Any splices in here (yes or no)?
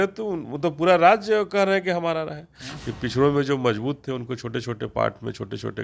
yes